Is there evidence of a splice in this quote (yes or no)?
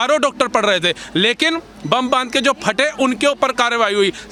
no